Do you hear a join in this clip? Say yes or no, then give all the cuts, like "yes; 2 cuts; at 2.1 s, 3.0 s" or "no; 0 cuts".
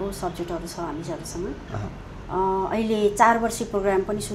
no; 0 cuts